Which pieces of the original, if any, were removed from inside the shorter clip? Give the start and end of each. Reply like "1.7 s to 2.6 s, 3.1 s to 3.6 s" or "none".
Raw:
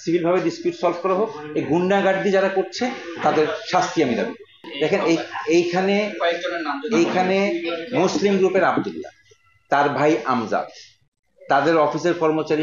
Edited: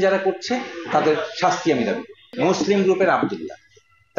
4.5 s to 7.8 s